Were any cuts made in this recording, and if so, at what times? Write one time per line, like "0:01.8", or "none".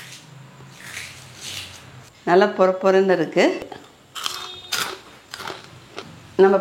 none